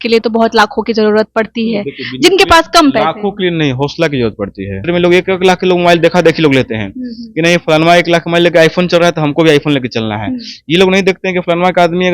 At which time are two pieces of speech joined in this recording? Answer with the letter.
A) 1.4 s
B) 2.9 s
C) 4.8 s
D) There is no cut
C